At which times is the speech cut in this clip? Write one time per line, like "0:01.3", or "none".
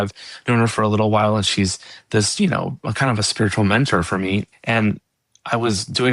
0:04.5

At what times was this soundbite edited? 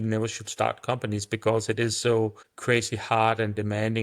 0:02.5

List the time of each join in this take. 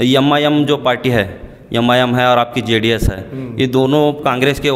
none

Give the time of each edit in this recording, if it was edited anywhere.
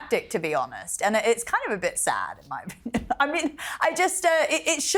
none

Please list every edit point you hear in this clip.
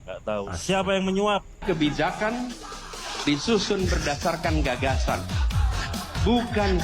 0:01.6

